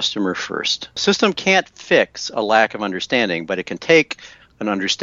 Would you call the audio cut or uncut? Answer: cut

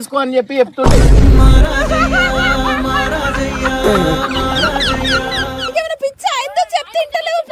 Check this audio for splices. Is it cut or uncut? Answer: cut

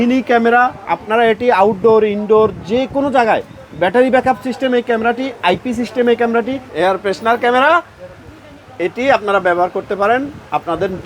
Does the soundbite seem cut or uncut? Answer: cut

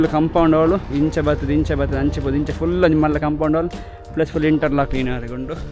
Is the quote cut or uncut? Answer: uncut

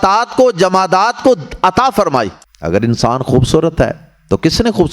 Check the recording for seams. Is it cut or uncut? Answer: uncut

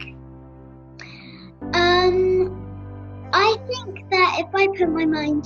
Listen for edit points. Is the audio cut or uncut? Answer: uncut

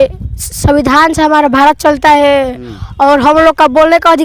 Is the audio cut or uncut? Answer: uncut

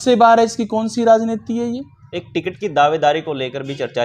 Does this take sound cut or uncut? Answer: uncut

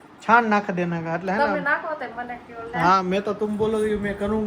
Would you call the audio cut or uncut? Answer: uncut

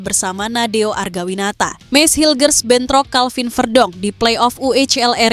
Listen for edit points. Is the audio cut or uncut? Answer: cut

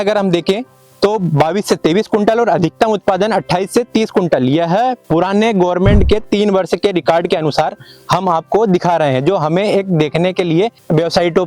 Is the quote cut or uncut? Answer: uncut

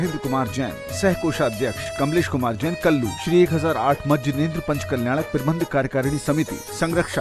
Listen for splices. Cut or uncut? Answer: uncut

